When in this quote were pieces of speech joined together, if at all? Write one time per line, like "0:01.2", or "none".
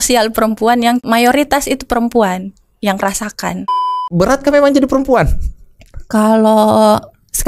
0:01.0
0:03.8

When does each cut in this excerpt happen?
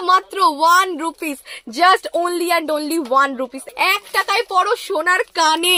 0:03.6

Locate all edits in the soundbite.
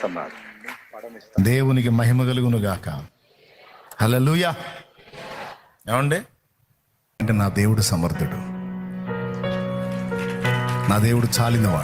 0:07.2

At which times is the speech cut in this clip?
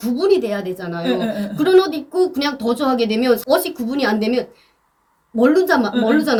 none

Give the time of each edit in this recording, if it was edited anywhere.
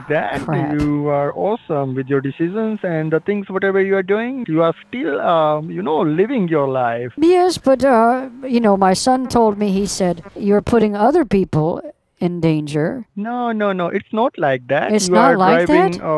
0:04.4
0:07.1
0:10.3
0:13.1

